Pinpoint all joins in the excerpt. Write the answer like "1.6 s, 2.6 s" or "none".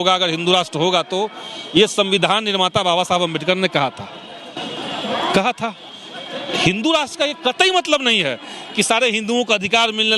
none